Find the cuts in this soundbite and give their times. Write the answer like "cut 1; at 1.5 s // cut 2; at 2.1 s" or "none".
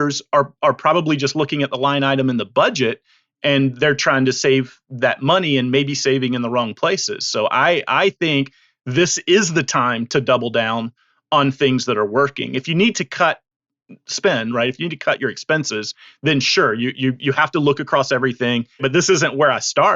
cut 1; at 18.8 s